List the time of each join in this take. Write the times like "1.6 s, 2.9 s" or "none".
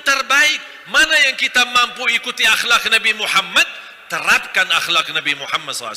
none